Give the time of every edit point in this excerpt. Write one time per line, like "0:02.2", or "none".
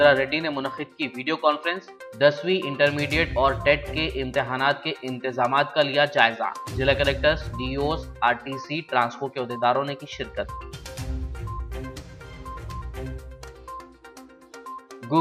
none